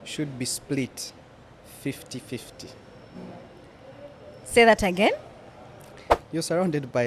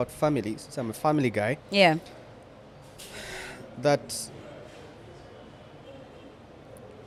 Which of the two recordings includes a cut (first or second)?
first